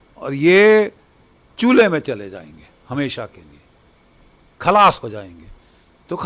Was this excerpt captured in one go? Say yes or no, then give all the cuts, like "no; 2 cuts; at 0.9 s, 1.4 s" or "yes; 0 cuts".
yes; 0 cuts